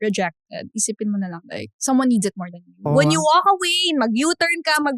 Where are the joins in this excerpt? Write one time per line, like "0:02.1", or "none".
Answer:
0:01.7
0:02.8